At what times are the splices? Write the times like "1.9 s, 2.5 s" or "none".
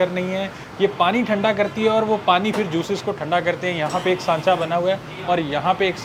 none